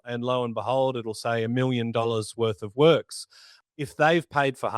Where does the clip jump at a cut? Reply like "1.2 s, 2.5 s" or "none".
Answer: 3.5 s